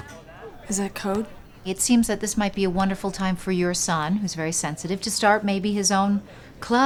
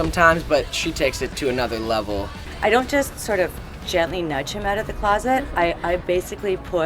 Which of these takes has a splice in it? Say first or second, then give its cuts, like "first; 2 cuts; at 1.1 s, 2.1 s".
second; 1 cut; at 2.5 s